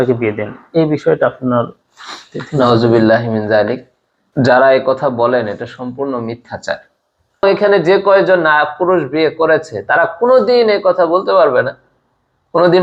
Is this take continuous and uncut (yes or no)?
no